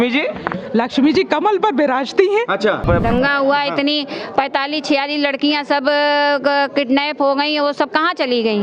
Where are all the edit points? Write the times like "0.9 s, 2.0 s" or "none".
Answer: 2.8 s